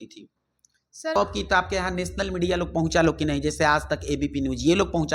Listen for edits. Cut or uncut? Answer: cut